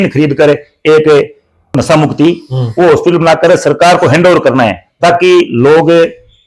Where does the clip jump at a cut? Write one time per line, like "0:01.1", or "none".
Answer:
0:01.8